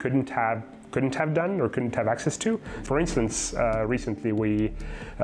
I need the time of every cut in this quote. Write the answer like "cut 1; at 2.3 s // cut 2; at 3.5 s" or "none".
cut 1; at 2.8 s